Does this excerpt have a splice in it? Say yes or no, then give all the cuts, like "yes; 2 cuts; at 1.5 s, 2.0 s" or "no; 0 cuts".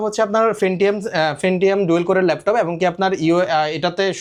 no; 0 cuts